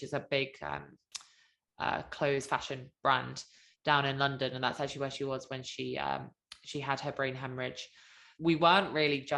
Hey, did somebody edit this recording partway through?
yes; 1 cut; at 8.3 s

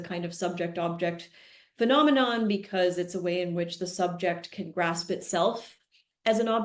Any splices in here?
no; 0 cuts

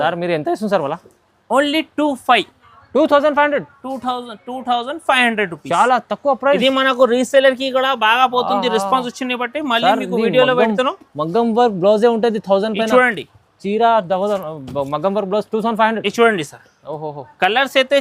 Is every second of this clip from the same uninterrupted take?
yes; 0 cuts

